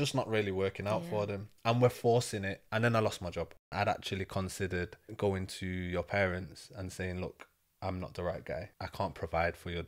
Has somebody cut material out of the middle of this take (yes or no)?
yes